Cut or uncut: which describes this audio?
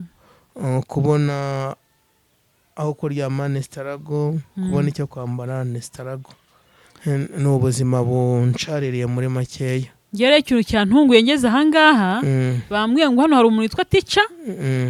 uncut